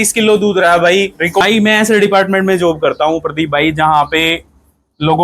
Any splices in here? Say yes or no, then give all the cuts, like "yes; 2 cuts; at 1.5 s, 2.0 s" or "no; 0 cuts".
yes; 1 cut; at 1.4 s